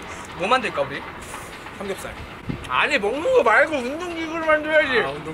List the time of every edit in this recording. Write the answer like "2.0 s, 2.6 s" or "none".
none